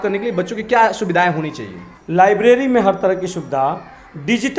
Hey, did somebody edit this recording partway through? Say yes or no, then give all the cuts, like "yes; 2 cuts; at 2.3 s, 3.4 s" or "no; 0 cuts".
yes; 1 cut; at 1.9 s